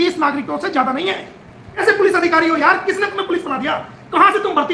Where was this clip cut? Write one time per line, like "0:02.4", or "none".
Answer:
0:01.8